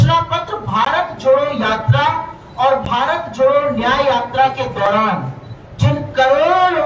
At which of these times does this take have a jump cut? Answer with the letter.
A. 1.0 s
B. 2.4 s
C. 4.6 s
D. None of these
D